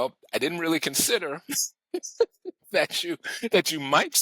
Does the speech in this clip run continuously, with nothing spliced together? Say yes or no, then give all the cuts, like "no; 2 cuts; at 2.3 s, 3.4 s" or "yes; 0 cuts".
yes; 0 cuts